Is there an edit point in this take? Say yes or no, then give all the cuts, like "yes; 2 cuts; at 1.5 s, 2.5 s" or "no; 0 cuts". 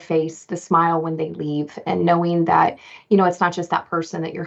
no; 0 cuts